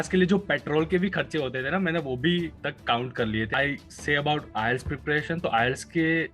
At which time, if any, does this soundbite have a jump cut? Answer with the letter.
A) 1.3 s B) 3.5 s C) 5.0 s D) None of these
B